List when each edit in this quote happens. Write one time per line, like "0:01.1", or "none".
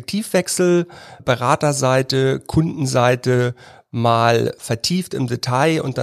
0:01.2
0:04.6